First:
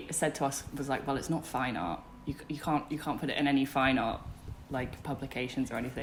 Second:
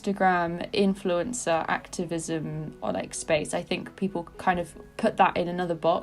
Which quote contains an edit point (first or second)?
second